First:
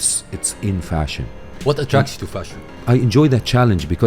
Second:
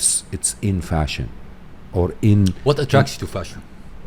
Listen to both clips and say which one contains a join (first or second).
first